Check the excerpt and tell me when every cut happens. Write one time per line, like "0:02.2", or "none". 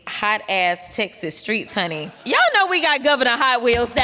0:02.2